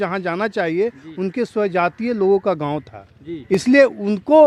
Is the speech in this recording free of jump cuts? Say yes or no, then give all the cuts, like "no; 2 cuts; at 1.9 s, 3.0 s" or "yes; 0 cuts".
yes; 0 cuts